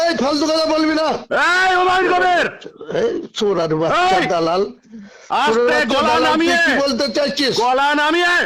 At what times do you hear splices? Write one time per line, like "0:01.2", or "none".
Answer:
none